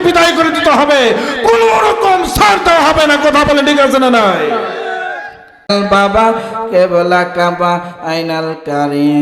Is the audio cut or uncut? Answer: cut